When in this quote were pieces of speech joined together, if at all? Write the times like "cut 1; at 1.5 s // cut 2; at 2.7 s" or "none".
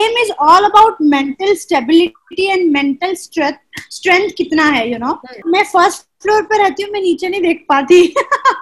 cut 1; at 5.4 s